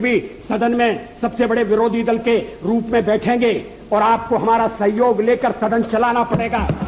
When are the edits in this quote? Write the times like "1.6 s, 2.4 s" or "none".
none